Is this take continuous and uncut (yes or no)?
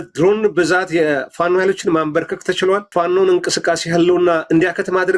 no